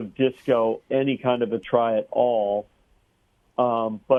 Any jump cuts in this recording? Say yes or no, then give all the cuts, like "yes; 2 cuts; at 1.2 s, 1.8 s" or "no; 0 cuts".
no; 0 cuts